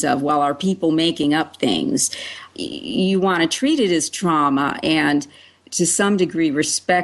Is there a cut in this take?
yes; 1 cut; at 2.5 s

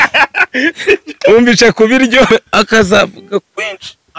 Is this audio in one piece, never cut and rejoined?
no; 1 cut; at 2.3 s

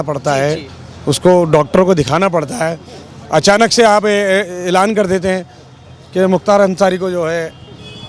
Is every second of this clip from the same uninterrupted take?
yes; 0 cuts

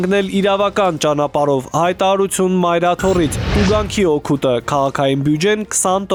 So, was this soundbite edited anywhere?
no; 0 cuts

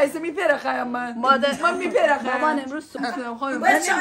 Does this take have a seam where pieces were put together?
yes; 1 cut; at 3.0 s

